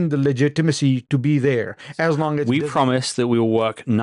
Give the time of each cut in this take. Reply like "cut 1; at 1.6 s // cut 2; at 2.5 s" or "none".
cut 1; at 2.5 s